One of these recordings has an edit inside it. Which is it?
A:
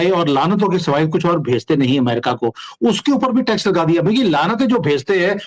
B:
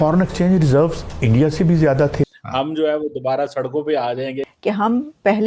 B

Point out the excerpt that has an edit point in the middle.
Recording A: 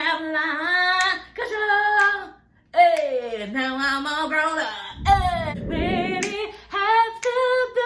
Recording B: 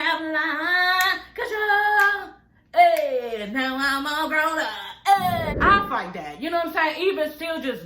B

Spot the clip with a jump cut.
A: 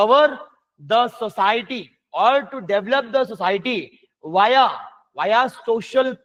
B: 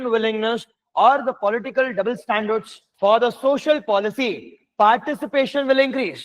B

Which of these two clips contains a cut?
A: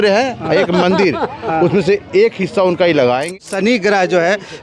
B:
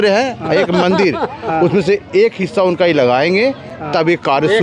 A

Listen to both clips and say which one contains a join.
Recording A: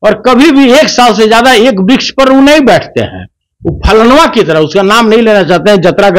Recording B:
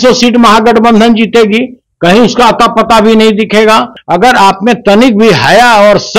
B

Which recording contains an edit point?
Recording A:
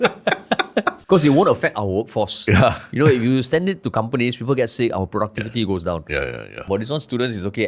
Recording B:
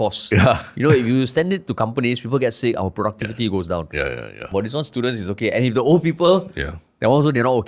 A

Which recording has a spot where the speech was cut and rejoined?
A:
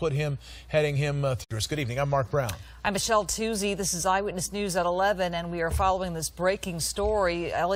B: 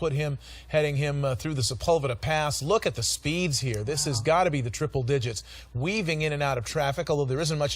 B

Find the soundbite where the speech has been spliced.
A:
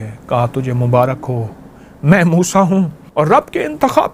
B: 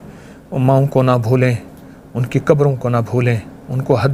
A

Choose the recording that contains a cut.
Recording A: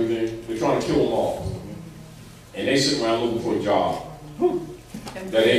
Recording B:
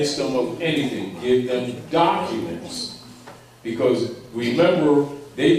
B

